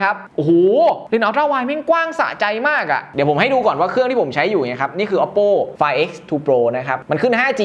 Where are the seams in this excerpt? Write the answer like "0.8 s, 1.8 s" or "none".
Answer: 3.1 s